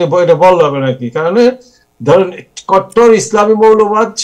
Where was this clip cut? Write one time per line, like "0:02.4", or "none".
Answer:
none